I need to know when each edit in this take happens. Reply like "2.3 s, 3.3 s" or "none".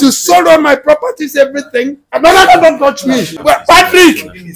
2.0 s, 3.3 s